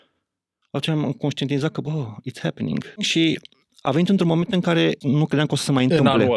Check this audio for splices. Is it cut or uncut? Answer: cut